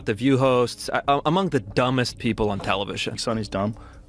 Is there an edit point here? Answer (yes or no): no